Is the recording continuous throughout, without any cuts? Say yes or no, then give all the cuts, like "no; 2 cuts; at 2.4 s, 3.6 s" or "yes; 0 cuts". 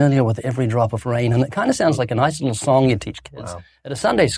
yes; 0 cuts